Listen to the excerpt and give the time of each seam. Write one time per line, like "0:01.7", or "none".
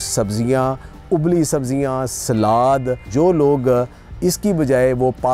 0:03.1